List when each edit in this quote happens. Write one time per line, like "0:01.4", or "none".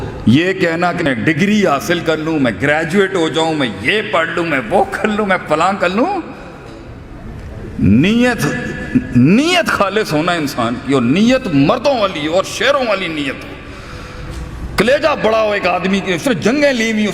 0:01.1